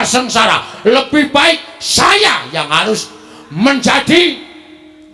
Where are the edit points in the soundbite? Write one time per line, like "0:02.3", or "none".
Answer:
none